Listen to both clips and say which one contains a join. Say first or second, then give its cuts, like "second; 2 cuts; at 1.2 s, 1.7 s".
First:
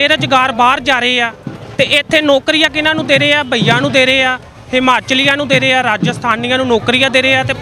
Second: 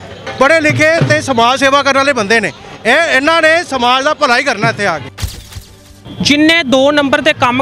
second; 1 cut; at 5.5 s